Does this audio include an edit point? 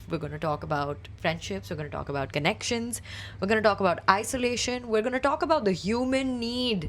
no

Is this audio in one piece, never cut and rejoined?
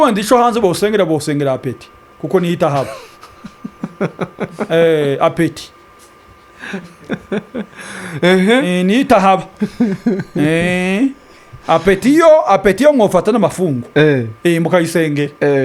yes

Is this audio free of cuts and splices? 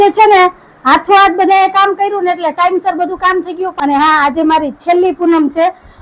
no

